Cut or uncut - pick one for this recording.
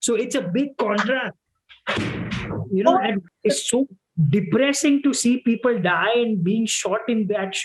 cut